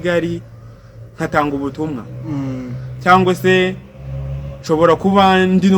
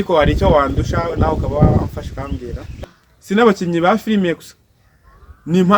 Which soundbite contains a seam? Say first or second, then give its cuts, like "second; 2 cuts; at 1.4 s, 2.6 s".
second; 1 cut; at 2.8 s